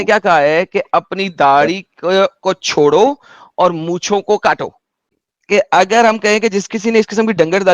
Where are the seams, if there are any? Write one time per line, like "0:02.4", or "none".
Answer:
0:05.0

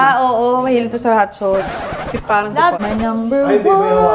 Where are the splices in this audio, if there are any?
0:02.8

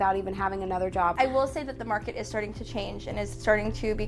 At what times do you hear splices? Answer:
0:01.1

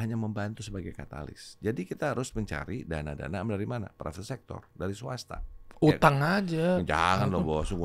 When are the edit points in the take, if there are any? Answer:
none

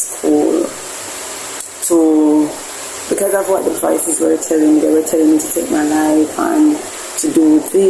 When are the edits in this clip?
none

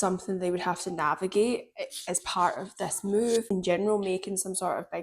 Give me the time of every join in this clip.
0:03.5

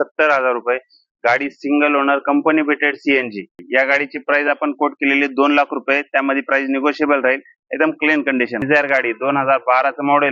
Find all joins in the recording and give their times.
0:03.6
0:08.6

